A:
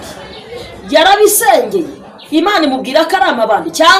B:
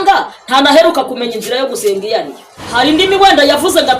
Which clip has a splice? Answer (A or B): B